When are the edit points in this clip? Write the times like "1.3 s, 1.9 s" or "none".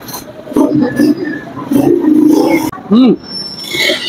none